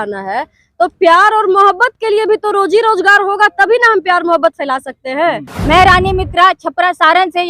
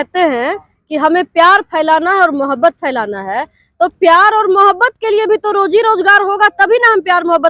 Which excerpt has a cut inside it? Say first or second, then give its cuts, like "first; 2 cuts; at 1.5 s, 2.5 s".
first; 1 cut; at 5.5 s